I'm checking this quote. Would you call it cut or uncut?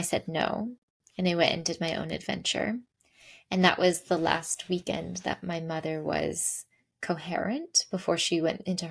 uncut